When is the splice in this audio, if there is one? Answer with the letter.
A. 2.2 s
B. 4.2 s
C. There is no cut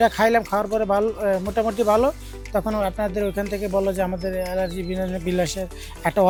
C